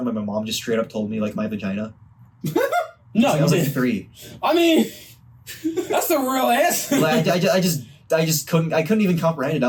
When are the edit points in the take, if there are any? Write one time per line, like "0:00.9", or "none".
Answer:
none